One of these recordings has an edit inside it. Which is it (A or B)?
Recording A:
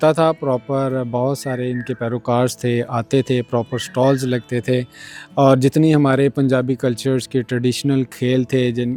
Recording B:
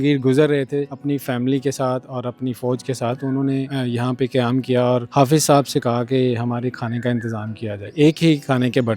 B